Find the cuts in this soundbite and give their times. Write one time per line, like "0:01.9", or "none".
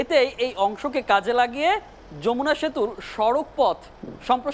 none

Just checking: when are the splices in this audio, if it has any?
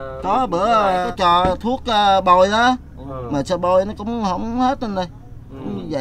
0:01.1

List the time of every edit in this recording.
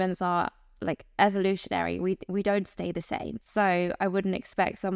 0:03.4

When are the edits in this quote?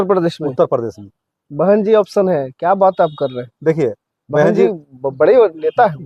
none

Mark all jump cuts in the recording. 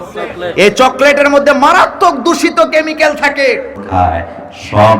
0:03.8

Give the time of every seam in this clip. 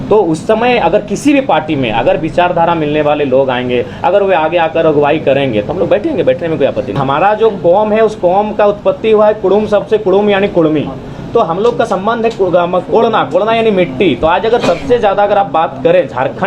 0:07.0

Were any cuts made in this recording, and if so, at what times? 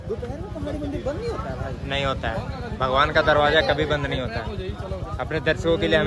none

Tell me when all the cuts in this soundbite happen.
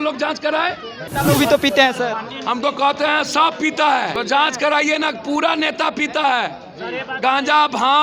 0:01.1
0:04.2

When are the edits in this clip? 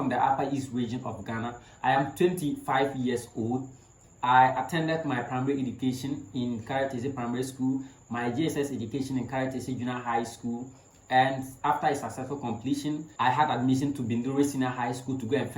0:13.1

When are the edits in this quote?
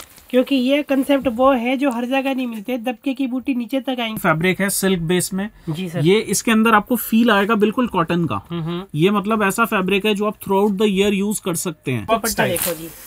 0:04.2
0:12.0

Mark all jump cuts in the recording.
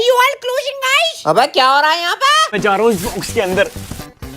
0:02.5

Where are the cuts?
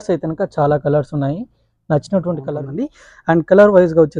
0:02.5

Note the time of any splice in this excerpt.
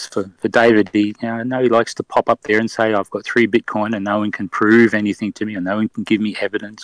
none

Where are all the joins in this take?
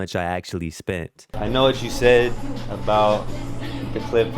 0:01.3

